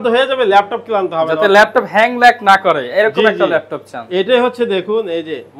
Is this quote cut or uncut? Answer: uncut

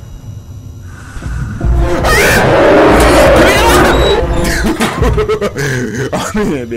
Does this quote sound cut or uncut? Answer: uncut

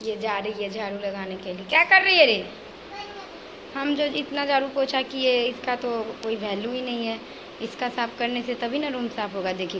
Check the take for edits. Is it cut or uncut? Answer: uncut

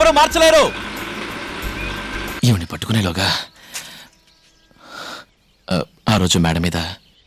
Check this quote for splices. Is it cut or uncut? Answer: cut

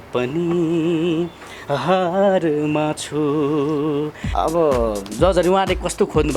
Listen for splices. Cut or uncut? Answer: cut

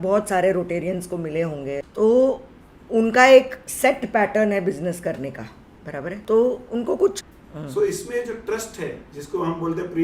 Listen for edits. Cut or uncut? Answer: cut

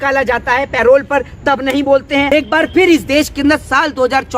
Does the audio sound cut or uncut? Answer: cut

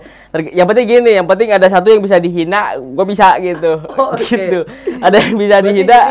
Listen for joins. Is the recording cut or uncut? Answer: uncut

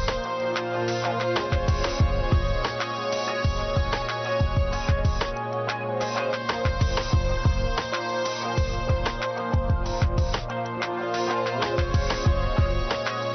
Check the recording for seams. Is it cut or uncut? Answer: uncut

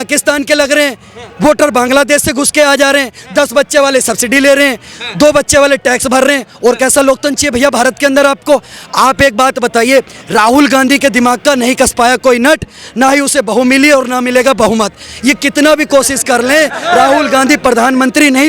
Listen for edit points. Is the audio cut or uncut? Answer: uncut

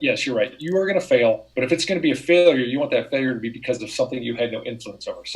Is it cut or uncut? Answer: cut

